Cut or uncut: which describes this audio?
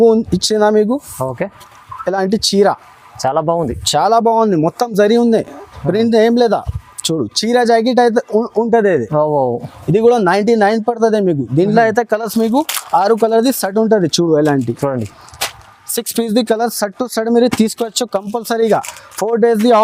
uncut